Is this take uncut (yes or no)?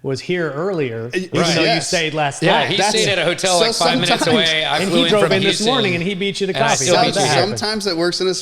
yes